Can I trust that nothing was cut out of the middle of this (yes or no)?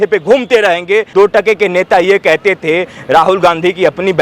no